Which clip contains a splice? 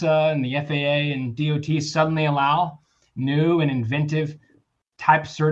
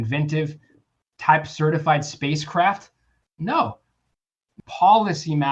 second; 1 cut; at 4.5 s

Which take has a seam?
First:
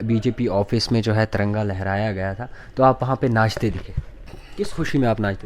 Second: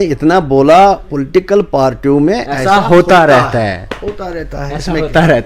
first; 1 cut; at 4.4 s

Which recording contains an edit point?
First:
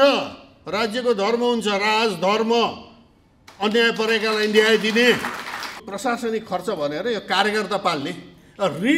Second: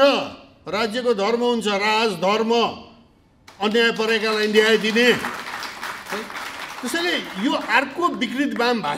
first; 1 cut; at 5.8 s

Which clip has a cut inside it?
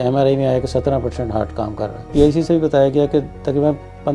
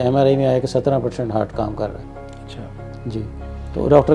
first; 1 cut; at 2.1 s

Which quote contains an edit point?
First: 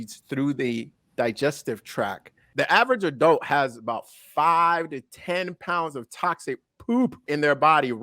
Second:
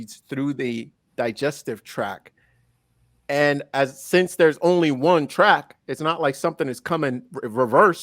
first; 2 cuts; at 2.5 s, 7.2 s

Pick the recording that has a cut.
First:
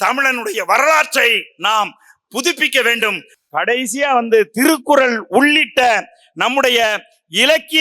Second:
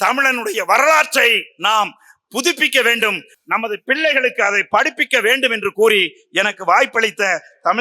first; 1 cut; at 3.3 s

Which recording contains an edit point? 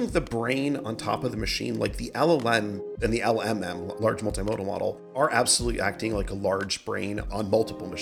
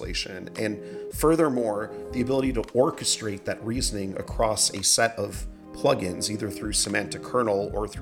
first; 4 cuts; at 3.0 s, 4.0 s, 5.1 s, 7.3 s

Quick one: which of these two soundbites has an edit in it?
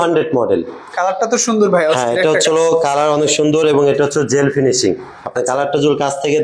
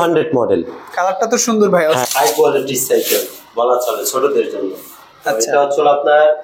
second; 1 cut; at 2.1 s

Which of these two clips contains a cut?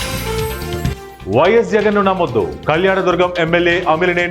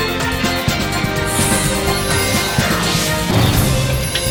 first; 1 cut; at 0.9 s

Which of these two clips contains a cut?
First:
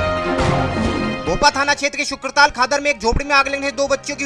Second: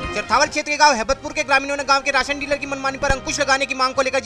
first; 1 cut; at 1.1 s

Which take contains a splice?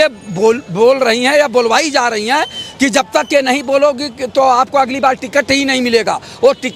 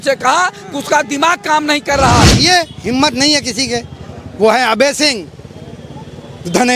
second; 1 cut; at 2.4 s

